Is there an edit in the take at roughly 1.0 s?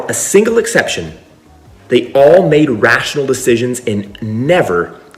no; 0 cuts

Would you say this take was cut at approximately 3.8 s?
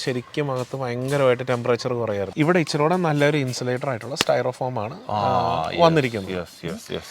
no; 1 cut; at 2.3 s

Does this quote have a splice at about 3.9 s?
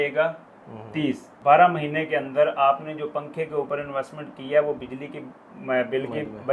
no; 1 cut; at 1.3 s

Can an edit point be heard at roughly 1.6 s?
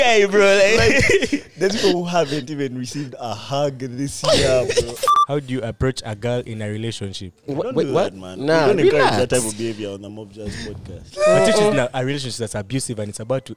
no; 3 cuts; at 5.1 s, 7.5 s, 11.0 s

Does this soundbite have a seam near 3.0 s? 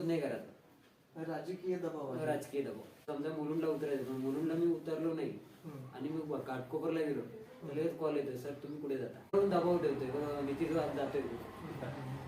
yes; 2 cuts; at 3.0 s, 9.3 s

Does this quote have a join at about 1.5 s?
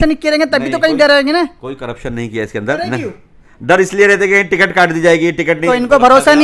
no; 2 cuts; at 2.8 s, 5.6 s

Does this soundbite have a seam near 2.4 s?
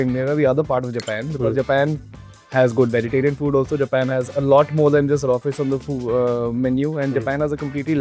no; 0 cuts

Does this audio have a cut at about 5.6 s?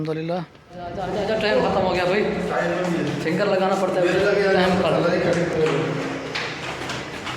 no; 1 cut; at 1.0 s

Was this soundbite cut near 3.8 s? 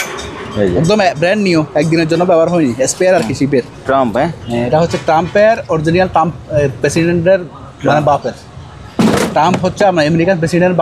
yes; 1 cut; at 3.8 s

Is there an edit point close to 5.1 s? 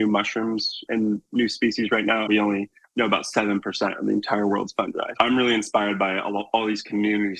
yes; 2 cuts; at 2.3 s, 5.1 s

